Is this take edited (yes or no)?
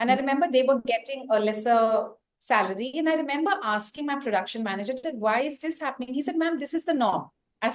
no